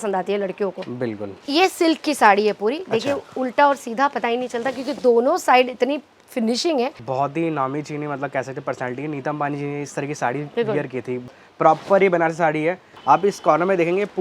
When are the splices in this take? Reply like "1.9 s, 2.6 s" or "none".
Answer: 1.3 s, 7.0 s, 11.2 s, 12.9 s